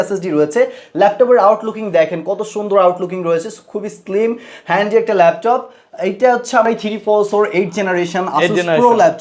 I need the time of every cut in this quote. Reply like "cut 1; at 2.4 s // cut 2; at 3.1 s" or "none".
cut 1; at 6.6 s